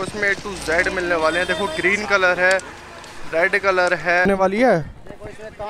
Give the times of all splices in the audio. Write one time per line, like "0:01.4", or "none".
0:04.3